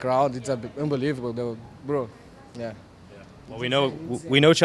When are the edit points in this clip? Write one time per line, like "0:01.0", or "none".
none